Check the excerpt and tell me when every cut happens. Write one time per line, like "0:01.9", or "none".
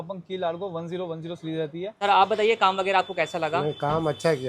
0:01.9